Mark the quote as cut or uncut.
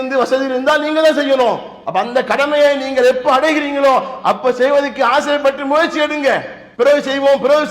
cut